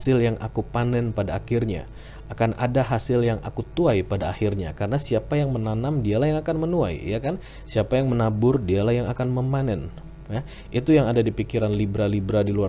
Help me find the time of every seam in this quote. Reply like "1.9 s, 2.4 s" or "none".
none